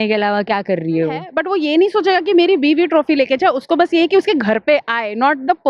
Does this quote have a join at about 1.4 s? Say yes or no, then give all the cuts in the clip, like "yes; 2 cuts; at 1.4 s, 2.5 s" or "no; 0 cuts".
yes; 1 cut; at 1.4 s